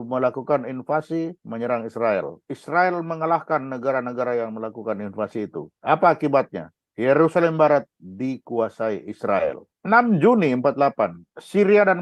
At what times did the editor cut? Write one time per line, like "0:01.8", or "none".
0:02.5
0:05.7
0:09.7